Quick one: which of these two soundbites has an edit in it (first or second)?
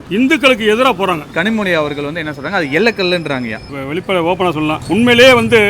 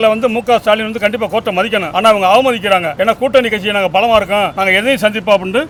first